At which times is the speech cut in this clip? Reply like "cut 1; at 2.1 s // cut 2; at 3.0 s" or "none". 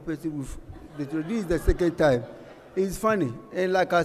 none